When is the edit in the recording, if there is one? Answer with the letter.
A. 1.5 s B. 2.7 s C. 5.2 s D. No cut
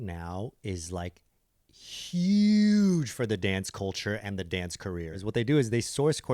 C